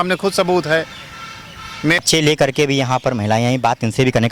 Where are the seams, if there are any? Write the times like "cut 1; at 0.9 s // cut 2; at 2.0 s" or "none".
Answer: cut 1; at 2.0 s